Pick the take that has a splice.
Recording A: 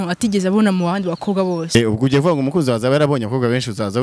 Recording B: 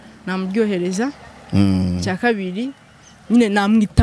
A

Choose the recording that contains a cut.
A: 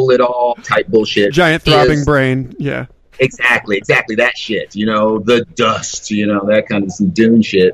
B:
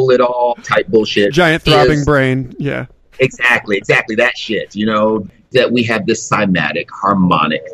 B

